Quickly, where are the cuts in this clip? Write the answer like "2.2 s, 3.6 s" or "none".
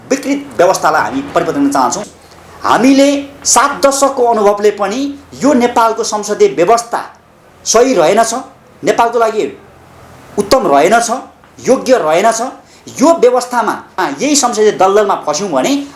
2.1 s, 13.8 s